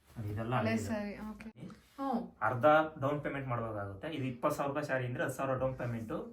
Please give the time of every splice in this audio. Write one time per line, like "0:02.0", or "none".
0:01.5

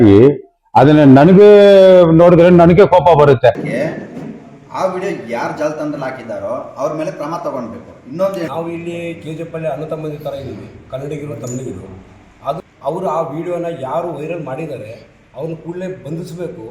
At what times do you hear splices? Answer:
0:03.6
0:08.5
0:12.6

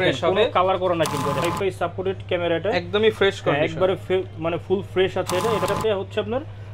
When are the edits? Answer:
0:01.4
0:05.7

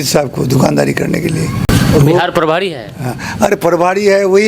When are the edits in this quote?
0:01.7

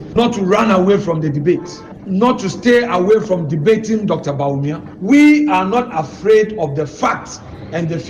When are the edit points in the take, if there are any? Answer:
none

